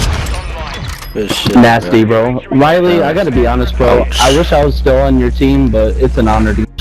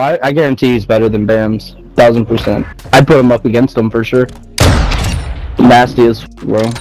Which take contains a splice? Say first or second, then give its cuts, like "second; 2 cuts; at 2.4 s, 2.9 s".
second; 2 cuts; at 2.7 s, 4.4 s